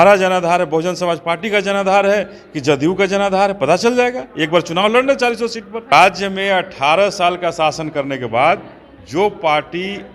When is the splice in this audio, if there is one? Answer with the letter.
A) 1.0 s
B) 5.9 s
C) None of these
B